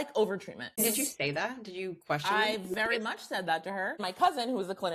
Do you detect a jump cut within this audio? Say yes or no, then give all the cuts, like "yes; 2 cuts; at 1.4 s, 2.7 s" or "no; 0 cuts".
yes; 2 cuts; at 0.8 s, 4.0 s